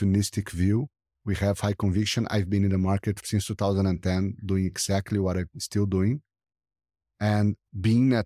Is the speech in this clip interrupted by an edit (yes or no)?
no